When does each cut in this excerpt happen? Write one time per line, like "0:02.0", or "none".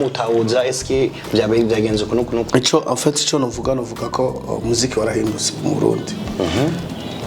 0:02.5